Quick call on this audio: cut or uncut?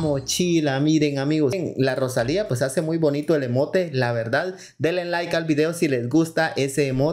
cut